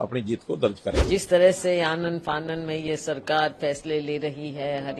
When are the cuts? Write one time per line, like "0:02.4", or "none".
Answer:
0:01.0